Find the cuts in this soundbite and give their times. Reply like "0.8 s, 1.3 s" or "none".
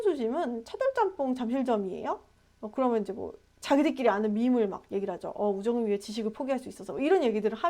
none